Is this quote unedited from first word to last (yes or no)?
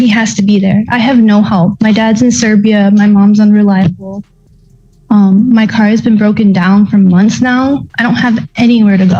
yes